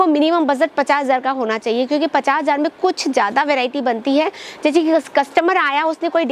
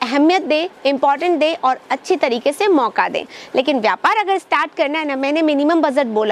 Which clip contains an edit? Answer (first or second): second